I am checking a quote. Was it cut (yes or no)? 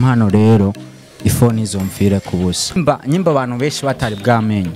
yes